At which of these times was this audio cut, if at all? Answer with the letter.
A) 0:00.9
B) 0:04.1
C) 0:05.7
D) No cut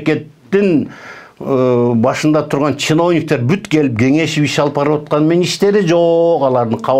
D